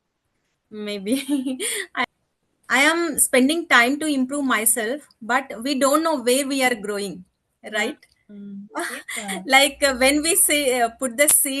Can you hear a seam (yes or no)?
yes